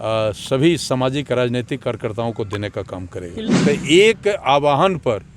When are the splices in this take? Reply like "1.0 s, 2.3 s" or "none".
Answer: 3.6 s